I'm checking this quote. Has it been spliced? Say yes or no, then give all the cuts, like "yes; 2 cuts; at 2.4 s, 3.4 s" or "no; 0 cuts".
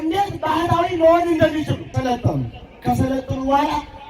yes; 1 cut; at 1.9 s